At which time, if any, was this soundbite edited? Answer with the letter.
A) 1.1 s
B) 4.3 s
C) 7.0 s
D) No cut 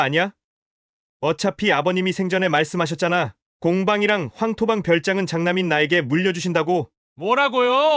C